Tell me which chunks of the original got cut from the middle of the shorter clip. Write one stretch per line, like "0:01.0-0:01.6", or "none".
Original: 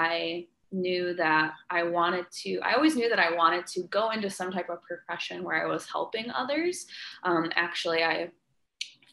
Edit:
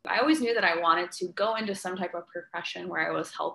none

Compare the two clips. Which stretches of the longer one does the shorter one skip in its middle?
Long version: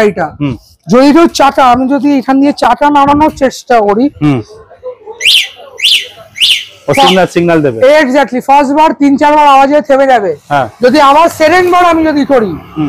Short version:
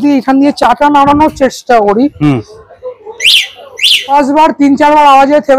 0:06.1-0:08.5

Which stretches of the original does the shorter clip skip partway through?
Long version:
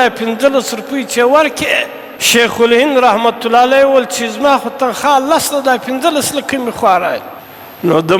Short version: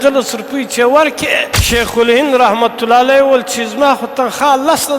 0:01.9-0:02.2

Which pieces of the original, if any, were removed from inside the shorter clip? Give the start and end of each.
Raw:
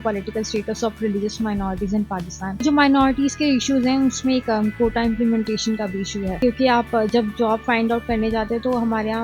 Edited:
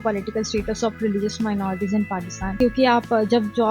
0:02.5-0:06.4

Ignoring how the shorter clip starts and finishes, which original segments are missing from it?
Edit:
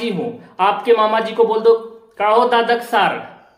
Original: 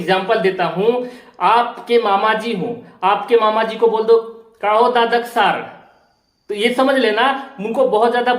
none

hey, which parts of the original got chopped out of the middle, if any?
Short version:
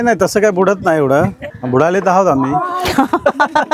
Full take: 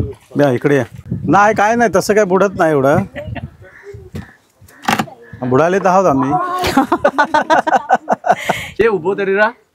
0:03.2-0:05.3

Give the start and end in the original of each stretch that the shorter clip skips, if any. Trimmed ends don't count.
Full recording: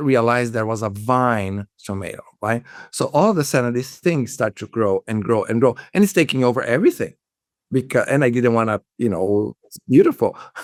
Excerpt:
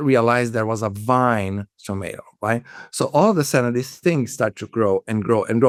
none

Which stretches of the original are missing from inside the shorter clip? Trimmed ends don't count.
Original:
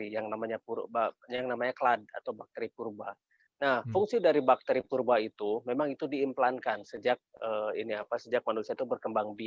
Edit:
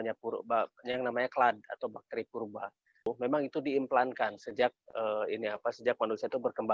0:03.5-0:05.6

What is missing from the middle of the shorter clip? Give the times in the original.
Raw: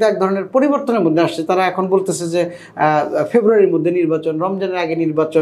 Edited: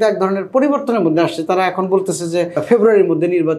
0:02.6-0:03.2

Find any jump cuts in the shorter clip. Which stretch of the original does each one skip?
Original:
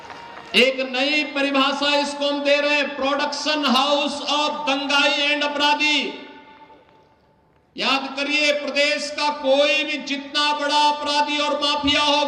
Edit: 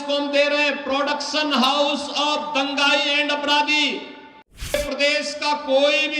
0:06.9-0:08.5

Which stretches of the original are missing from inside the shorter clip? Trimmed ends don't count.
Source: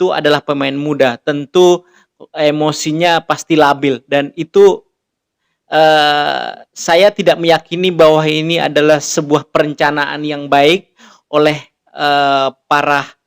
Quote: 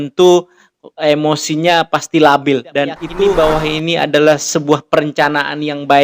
0:04.6-0:07.9

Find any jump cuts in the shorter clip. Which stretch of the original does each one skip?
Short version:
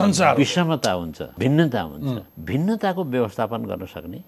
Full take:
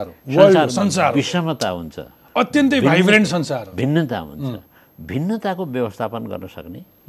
0:02.0-0:03.6
0:04.7-0:04.9

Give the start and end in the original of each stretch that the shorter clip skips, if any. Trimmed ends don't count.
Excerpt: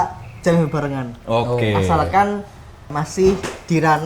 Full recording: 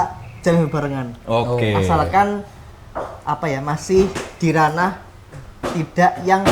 0:02.9-0:03.6

